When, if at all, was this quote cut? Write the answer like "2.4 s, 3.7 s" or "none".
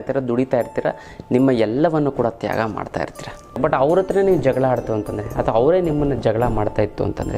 3.6 s

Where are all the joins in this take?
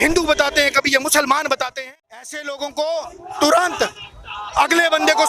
1.7 s

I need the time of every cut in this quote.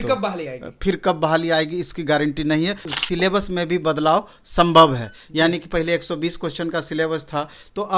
2.8 s

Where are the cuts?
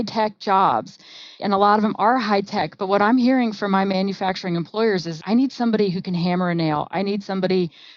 1.4 s, 5.2 s

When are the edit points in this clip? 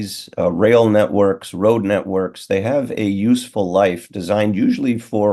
none

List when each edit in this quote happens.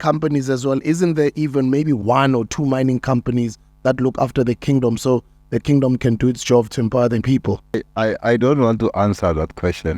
7.7 s

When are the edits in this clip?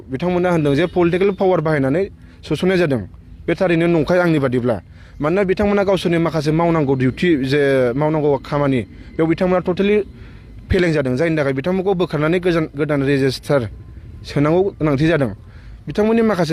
none

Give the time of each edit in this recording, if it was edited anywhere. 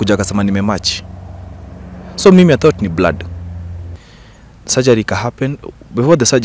3.8 s

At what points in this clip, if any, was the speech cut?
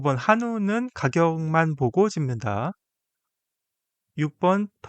none

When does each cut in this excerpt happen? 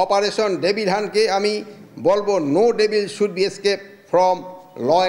none

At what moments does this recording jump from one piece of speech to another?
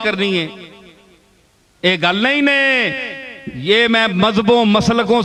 none

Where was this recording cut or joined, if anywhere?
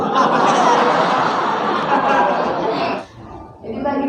3.0 s

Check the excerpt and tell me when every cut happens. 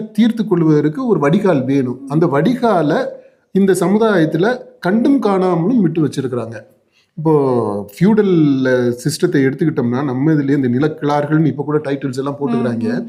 none

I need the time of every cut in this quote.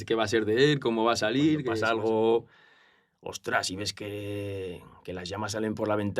1.8 s

